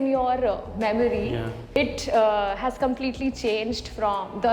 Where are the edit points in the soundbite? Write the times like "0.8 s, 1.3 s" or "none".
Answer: 1.6 s

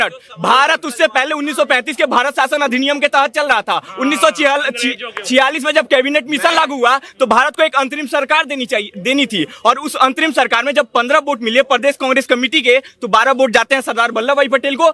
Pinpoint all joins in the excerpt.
none

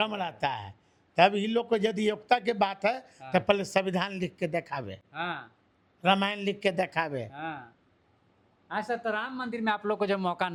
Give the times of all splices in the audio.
none

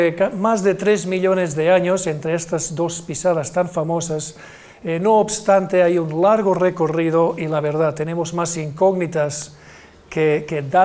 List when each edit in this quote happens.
none

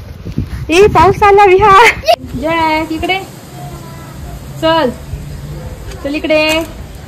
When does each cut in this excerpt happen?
2.3 s

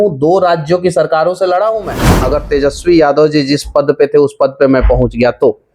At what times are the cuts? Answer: 2.1 s

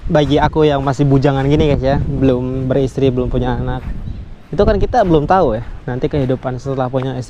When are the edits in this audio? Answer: none

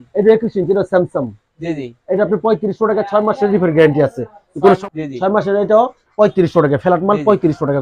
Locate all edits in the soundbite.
4.8 s

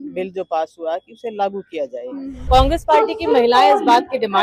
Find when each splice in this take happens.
2.3 s

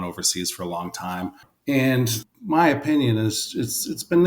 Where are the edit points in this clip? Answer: 1.5 s, 2.3 s

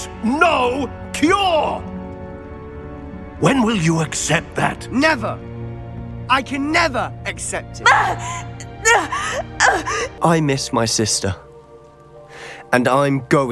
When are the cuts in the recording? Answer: 10.1 s

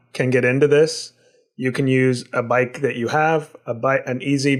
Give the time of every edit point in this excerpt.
none

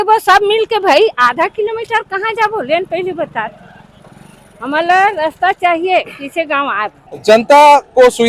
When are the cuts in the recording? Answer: none

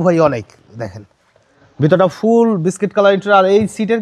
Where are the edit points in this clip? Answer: none

